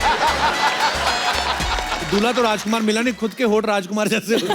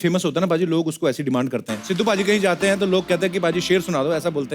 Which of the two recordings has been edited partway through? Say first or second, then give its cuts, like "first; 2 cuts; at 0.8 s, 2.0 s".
second; 1 cut; at 1.8 s